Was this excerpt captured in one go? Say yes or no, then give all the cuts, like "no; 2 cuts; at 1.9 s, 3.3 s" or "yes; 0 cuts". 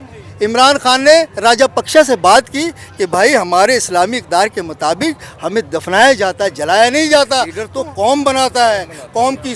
no; 1 cut; at 7.6 s